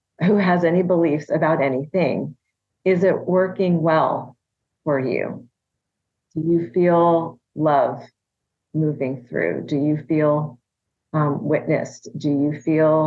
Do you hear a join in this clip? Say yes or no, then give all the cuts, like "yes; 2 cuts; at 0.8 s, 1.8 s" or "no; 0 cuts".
no; 0 cuts